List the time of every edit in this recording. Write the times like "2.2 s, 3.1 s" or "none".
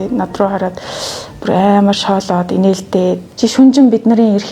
3.3 s